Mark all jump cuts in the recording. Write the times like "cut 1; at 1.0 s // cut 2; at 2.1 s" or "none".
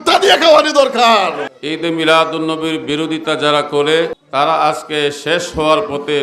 cut 1; at 1.5 s // cut 2; at 4.2 s